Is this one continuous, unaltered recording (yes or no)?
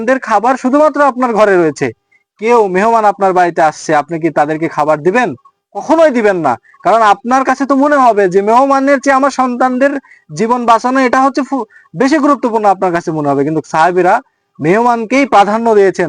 yes